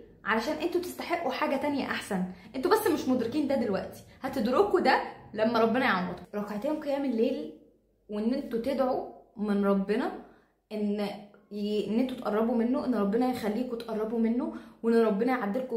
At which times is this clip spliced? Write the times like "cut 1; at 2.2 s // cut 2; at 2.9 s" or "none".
cut 1; at 6.1 s